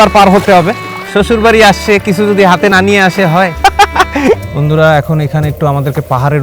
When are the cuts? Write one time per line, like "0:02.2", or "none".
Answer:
0:01.0
0:04.4